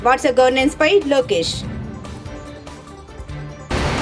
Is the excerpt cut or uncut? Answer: uncut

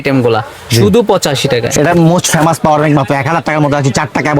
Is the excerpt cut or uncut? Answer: cut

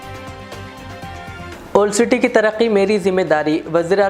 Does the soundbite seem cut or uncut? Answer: cut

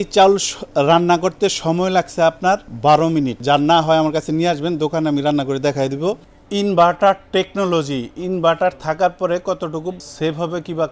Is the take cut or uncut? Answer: cut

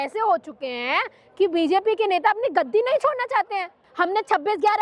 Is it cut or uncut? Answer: cut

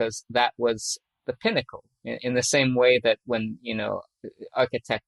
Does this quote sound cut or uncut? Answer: cut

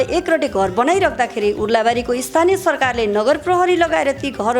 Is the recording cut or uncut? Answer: uncut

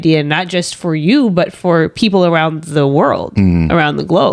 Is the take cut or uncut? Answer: uncut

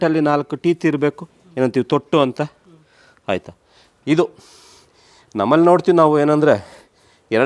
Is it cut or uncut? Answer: uncut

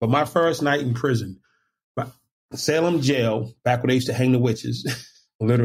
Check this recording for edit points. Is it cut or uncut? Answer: uncut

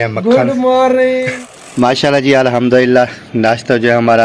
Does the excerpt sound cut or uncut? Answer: cut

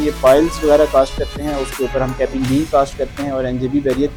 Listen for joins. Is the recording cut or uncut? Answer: uncut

